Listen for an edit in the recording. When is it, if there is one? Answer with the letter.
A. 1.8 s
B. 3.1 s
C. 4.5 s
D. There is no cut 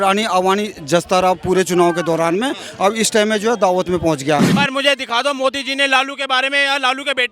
C